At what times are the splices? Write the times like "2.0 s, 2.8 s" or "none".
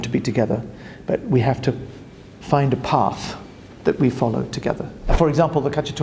5.1 s